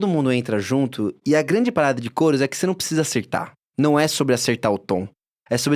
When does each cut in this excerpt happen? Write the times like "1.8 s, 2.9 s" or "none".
none